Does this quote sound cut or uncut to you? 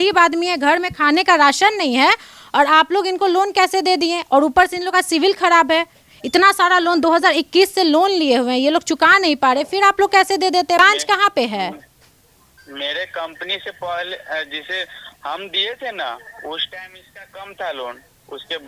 uncut